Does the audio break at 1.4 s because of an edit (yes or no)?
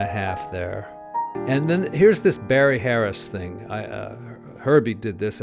yes